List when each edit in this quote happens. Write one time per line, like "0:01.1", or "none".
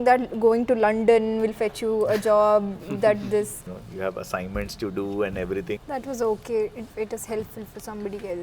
0:03.6
0:05.8
0:06.8